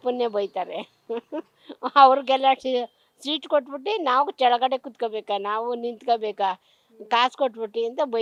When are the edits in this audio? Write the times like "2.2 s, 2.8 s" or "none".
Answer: none